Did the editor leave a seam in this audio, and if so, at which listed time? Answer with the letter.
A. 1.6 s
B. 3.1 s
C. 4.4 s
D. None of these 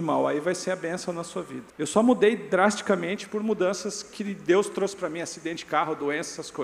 A